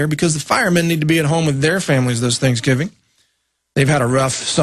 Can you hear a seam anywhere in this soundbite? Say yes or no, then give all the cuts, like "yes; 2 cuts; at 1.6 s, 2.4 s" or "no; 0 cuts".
yes; 1 cut; at 2.2 s